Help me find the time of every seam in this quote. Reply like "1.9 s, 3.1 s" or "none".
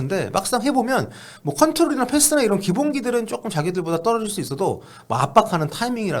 none